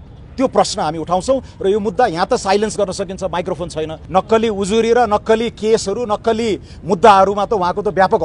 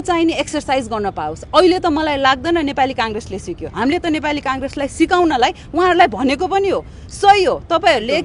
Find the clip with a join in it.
first; 1 cut; at 3.9 s

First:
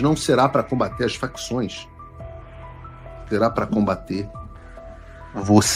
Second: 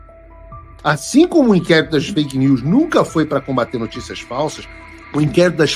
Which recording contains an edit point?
second; 1 cut; at 4.7 s

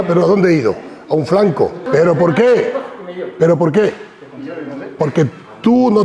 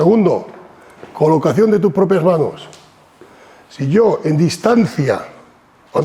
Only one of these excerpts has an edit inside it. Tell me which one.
first; 1 cut; at 1.9 s

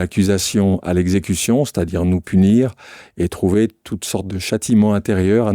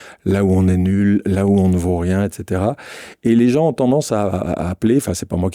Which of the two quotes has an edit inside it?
first; 1 cut; at 4.3 s

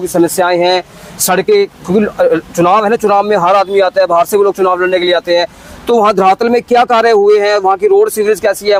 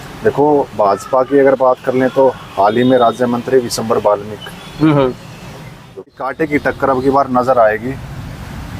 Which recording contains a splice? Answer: second; 1 cut; at 6.1 s

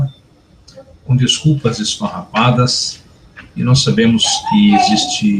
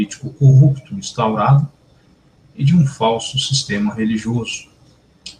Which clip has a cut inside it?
second; 1 cut; at 1.8 s

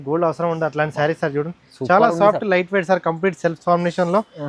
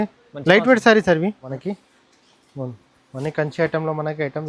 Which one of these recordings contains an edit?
second; 1 cut; at 1.5 s

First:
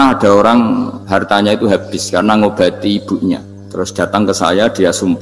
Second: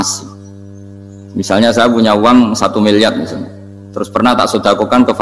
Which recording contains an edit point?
first; 2 cuts; at 1.0 s, 3.6 s

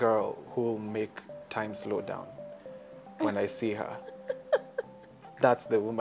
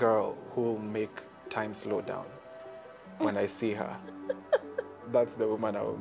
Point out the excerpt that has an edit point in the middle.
second; 1 cut; at 4.9 s

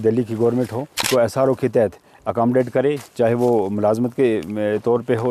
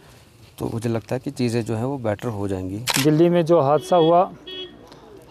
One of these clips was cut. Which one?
second; 1 cut; at 2.8 s

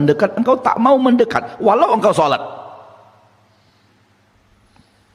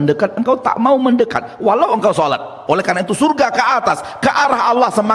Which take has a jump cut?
second; 1 cut; at 2.5 s

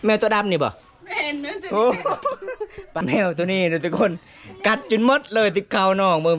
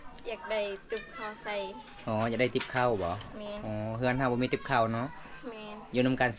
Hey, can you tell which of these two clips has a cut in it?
first; 1 cut; at 2.9 s

